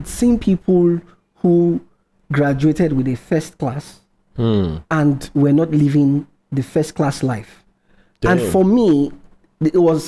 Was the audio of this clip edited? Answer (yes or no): no